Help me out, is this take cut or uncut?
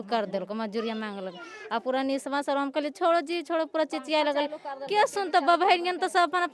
uncut